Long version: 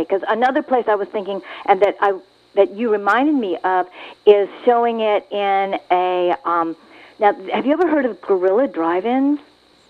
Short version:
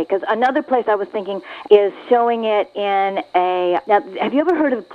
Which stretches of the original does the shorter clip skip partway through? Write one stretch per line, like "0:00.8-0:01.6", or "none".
0:01.5-0:04.0
0:06.4-0:07.2